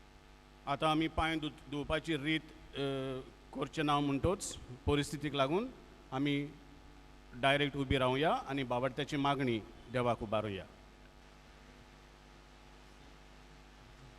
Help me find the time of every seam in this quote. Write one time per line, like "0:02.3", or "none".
0:11.2